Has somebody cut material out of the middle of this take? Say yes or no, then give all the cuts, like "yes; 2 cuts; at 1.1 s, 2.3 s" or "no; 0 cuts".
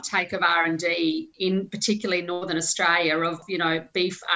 yes; 1 cut; at 3.4 s